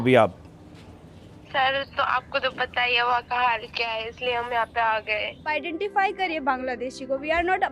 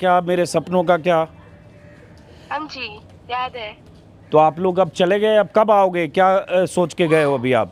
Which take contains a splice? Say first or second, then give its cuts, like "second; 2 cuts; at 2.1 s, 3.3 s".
first; 1 cut; at 5.5 s